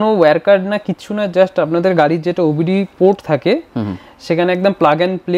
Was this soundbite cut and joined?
no; 0 cuts

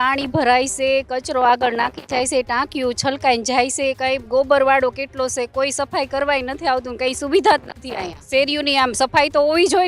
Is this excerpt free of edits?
no; 1 cut; at 8.2 s

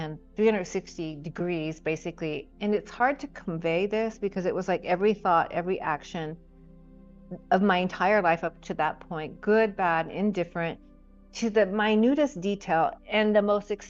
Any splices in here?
yes; 1 cut; at 2.4 s

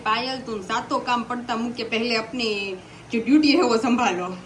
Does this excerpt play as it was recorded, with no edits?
yes; 0 cuts

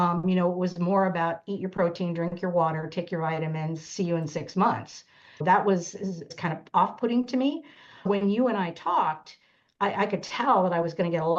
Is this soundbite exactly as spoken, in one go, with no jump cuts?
no; 3 cuts; at 5.4 s, 6.4 s, 8.1 s

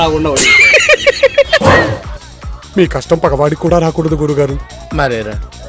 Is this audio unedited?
yes; 0 cuts

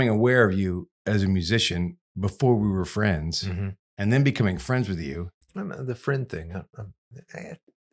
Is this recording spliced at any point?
yes; 1 cut; at 0.9 s

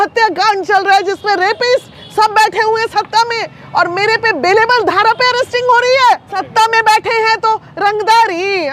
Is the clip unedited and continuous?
yes; 0 cuts

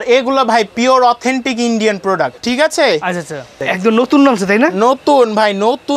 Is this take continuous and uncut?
no; 2 cuts; at 2.4 s, 3.6 s

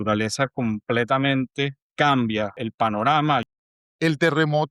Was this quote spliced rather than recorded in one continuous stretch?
yes; 3 cuts; at 1.8 s, 2.6 s, 3.5 s

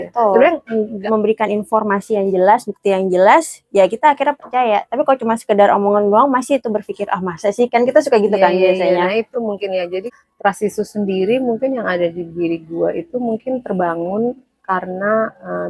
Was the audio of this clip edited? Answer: yes; 2 cuts; at 1.1 s, 10.2 s

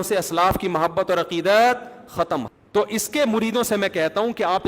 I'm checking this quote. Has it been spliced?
yes; 1 cut; at 2.4 s

